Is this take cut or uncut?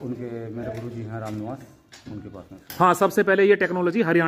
uncut